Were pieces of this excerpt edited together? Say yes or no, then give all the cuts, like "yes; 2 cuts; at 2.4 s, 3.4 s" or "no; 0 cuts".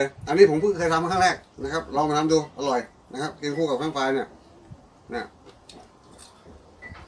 no; 0 cuts